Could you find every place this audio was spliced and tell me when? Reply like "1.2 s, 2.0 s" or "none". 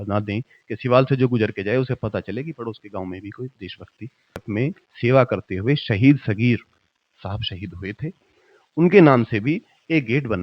4.4 s